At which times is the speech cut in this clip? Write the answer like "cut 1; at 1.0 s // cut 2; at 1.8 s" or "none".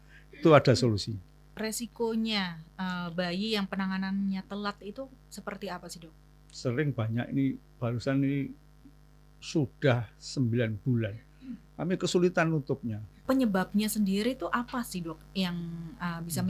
cut 1; at 1.4 s // cut 2; at 13.1 s